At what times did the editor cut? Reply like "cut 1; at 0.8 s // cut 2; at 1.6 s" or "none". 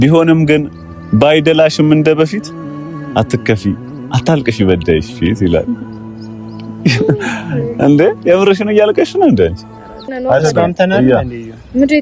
cut 1; at 10.1 s